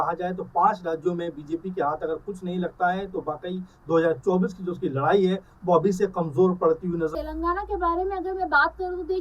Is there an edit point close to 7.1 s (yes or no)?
yes